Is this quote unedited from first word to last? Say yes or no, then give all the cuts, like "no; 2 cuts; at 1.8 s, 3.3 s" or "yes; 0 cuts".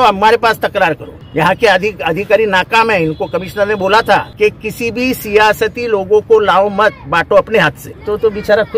no; 3 cuts; at 1.1 s, 4.3 s, 7.9 s